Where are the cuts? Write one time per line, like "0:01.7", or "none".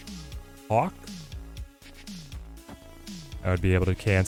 none